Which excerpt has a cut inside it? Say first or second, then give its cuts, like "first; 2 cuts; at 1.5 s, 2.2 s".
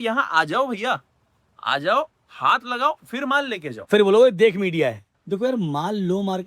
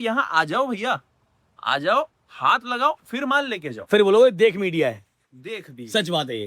first; 1 cut; at 5.1 s